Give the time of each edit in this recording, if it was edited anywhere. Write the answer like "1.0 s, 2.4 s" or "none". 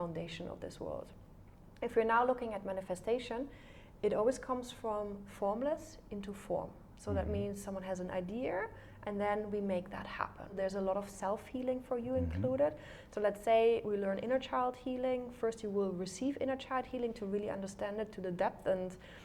10.5 s